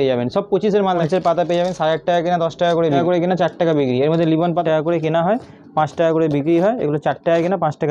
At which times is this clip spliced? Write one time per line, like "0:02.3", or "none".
0:01.0
0:03.0
0:04.6